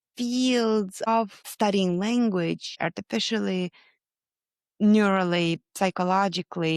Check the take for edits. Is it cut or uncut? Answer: cut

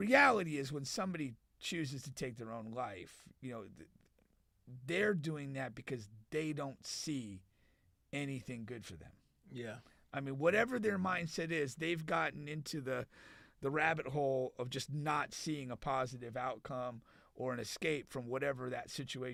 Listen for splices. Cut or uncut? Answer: uncut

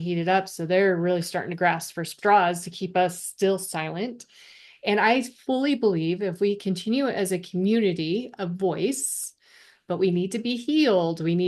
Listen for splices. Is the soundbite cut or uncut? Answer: cut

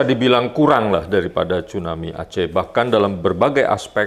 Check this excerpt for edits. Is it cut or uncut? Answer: uncut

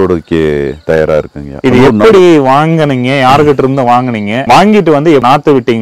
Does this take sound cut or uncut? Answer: uncut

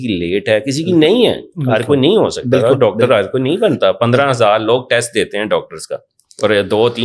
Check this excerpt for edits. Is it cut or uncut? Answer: uncut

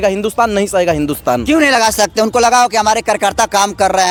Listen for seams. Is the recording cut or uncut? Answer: uncut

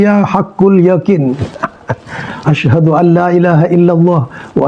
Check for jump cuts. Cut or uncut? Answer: uncut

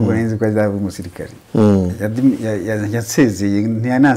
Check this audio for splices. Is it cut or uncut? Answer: uncut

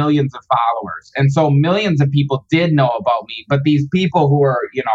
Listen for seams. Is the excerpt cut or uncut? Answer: uncut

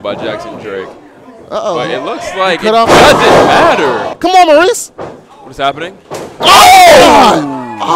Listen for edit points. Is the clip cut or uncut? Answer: cut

